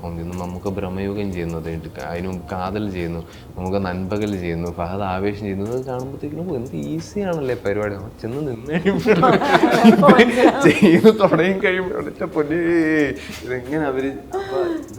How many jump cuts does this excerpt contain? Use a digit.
0